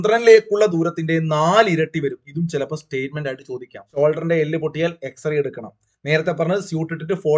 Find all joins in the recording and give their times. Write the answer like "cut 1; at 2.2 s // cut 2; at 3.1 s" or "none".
cut 1; at 4.0 s